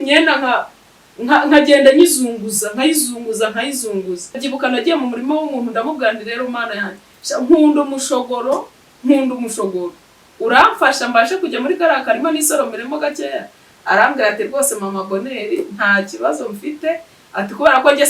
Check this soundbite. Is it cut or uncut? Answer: cut